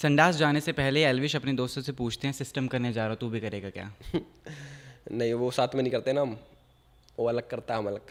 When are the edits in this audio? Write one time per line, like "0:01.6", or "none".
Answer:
none